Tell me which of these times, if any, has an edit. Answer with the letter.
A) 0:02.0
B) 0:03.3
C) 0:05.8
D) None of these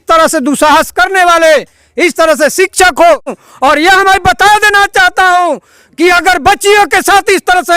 B